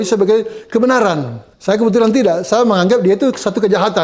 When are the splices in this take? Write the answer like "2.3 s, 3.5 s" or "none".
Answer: none